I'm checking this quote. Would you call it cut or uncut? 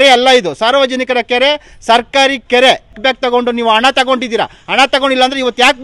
cut